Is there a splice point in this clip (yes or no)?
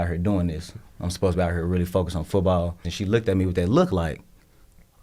yes